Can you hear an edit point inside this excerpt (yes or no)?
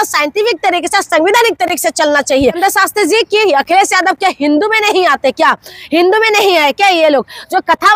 yes